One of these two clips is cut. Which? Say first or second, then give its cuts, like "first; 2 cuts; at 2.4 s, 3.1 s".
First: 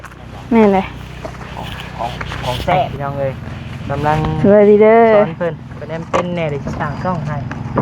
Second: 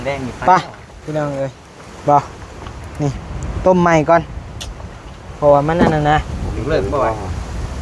first; 1 cut; at 2.9 s